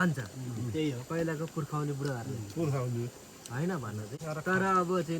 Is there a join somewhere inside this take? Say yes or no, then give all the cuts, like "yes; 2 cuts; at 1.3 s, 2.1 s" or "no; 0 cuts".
yes; 1 cut; at 4.1 s